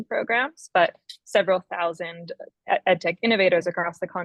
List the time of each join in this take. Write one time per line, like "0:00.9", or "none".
none